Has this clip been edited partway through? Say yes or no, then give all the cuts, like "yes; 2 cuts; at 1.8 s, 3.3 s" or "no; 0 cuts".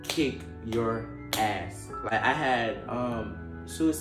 yes; 1 cut; at 2.1 s